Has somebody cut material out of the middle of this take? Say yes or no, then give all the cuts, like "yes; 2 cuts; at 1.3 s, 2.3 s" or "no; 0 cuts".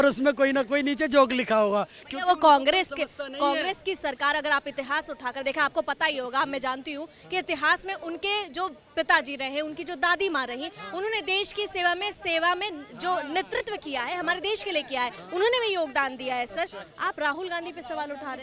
no; 0 cuts